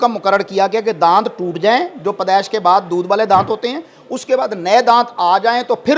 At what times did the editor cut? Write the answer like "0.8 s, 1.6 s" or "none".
none